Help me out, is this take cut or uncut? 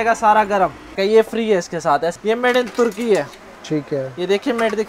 cut